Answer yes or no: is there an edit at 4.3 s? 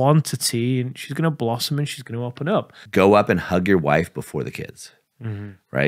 no